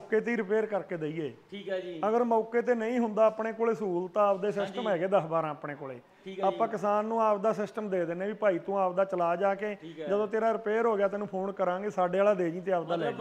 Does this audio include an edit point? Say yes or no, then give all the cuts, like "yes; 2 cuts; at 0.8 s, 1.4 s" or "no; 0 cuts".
no; 0 cuts